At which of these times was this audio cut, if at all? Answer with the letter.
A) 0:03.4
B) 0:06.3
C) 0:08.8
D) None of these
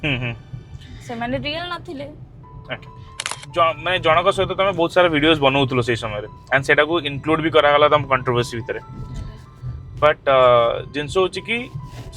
A